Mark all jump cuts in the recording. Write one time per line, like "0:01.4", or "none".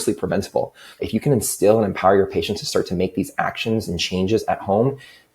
0:00.9